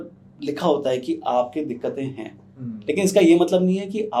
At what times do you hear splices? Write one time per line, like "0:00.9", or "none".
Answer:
none